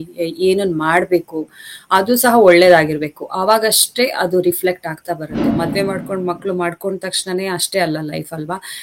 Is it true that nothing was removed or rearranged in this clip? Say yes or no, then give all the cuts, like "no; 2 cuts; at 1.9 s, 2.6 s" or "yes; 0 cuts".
no; 1 cut; at 5.5 s